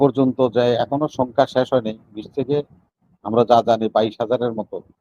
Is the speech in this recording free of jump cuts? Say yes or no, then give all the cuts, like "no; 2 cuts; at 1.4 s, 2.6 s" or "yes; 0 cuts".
yes; 0 cuts